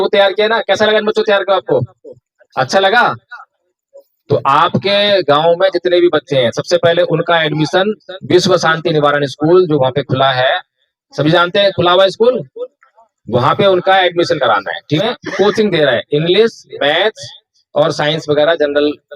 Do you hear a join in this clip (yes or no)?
yes